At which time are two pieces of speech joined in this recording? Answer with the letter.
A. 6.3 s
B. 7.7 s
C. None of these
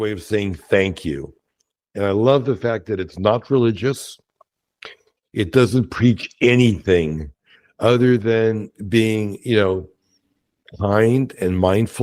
C